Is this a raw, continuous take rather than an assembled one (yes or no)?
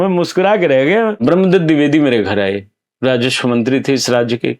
no